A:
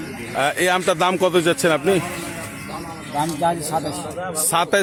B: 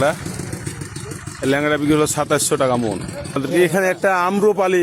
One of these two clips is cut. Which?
B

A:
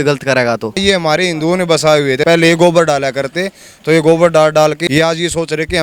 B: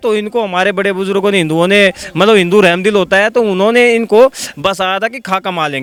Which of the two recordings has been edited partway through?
A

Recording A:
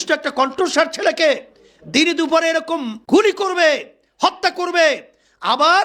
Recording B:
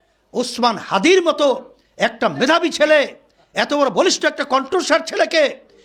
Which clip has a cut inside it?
A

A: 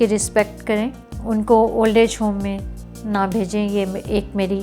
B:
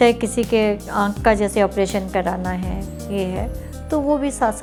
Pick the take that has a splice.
A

